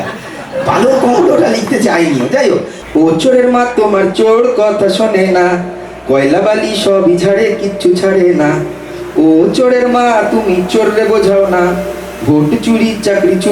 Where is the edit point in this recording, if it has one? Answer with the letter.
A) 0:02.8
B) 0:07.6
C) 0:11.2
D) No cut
A